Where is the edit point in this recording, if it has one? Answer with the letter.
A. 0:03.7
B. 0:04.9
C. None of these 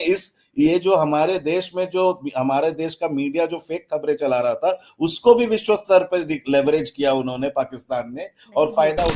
C